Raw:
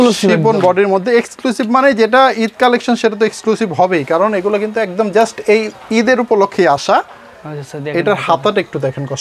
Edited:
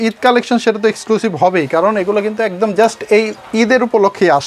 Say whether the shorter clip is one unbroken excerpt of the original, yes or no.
yes